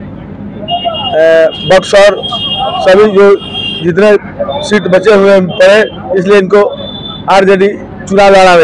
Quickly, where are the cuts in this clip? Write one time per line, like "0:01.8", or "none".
none